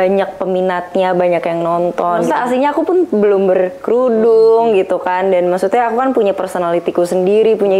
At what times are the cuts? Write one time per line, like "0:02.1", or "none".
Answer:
0:02.3